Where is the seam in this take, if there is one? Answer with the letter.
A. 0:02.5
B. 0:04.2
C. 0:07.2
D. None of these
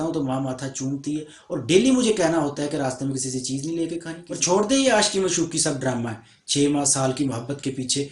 B